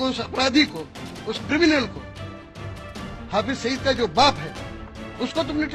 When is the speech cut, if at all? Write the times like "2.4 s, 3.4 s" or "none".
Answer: none